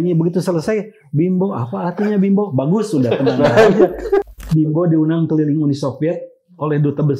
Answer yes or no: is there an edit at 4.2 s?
yes